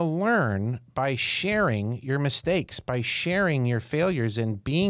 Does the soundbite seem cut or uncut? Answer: uncut